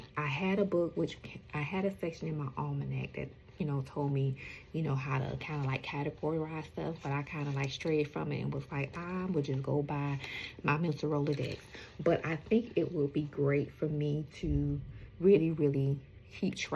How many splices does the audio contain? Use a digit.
0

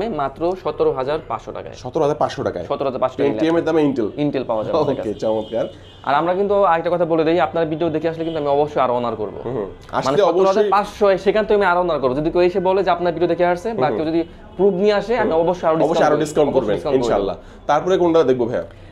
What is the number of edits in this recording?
0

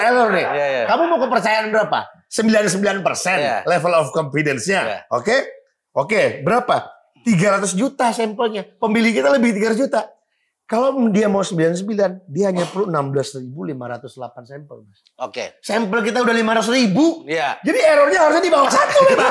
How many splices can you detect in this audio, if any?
0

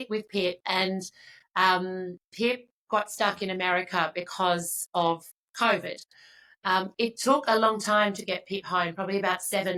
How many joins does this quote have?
0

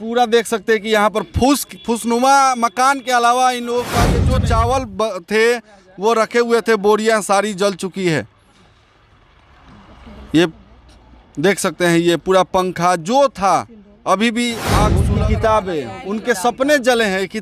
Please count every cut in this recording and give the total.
2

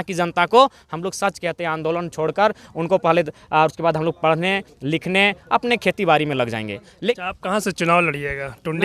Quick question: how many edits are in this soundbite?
1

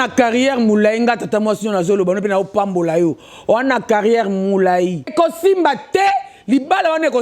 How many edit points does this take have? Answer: 1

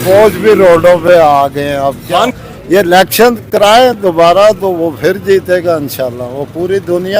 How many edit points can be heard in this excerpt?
1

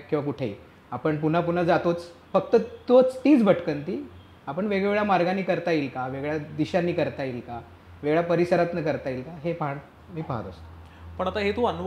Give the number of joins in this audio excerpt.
0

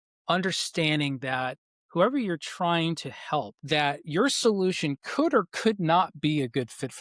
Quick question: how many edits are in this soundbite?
1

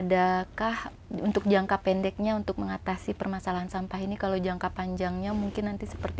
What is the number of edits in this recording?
1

